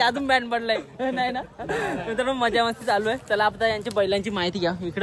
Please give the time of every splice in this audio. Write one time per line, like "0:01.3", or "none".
none